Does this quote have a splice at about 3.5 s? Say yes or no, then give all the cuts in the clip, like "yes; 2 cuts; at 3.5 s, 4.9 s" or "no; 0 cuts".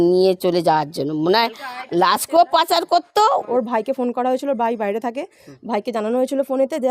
yes; 1 cut; at 3.5 s